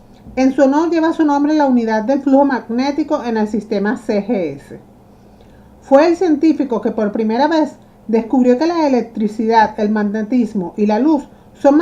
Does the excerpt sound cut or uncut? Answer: uncut